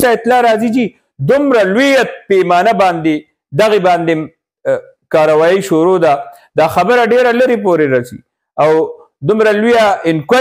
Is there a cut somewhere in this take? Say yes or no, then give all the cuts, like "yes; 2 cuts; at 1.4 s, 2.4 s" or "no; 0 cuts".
no; 0 cuts